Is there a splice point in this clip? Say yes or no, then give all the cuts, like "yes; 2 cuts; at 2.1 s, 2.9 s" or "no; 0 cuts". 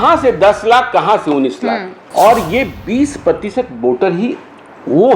yes; 1 cut; at 2.0 s